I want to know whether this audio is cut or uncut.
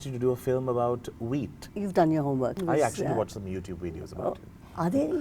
cut